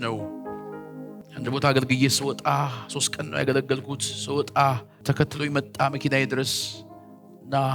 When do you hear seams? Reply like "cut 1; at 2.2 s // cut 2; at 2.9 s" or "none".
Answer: cut 1; at 1.2 s // cut 2; at 4.9 s